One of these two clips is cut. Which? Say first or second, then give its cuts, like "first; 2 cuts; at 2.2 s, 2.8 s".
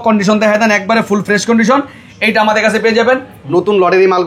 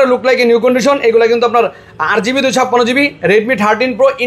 first; 1 cut; at 3.4 s